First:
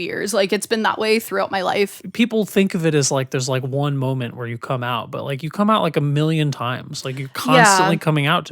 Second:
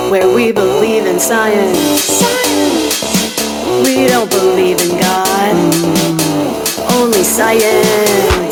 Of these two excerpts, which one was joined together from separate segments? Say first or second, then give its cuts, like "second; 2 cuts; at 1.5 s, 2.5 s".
first; 1 cut; at 1.9 s